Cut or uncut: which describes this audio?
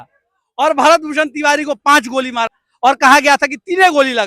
cut